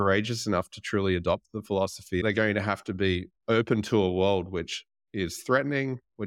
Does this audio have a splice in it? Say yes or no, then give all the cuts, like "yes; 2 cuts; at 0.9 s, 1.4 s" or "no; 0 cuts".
yes; 1 cut; at 2.2 s